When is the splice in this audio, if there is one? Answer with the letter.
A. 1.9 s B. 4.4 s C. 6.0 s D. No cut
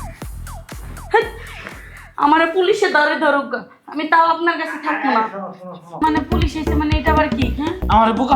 C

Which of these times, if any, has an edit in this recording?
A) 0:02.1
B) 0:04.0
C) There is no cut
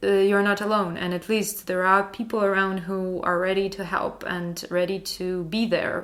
C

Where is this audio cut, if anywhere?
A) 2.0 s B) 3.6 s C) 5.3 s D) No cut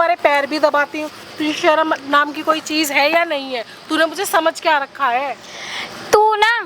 D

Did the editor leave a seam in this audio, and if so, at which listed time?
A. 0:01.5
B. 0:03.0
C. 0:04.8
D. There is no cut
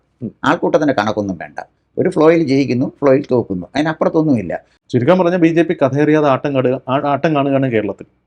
C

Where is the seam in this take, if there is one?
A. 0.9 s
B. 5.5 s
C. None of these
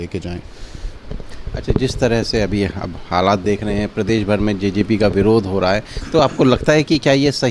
C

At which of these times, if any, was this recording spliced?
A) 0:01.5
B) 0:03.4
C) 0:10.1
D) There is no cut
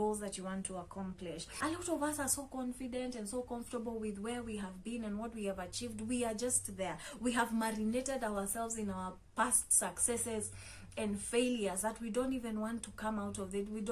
A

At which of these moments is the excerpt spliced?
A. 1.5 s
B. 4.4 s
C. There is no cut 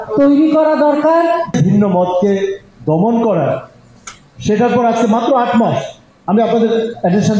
A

